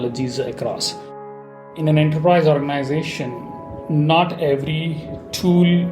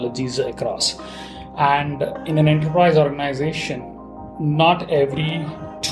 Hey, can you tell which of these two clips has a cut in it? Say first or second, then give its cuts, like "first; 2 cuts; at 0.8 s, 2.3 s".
first; 1 cut; at 1.6 s